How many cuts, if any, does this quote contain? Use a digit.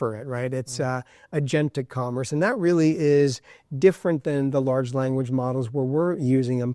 0